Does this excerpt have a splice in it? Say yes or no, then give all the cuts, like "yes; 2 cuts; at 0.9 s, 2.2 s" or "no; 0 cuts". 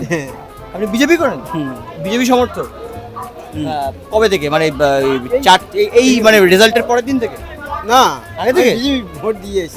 no; 0 cuts